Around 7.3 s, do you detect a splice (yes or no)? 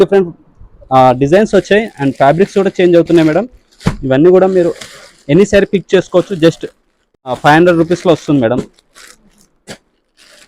yes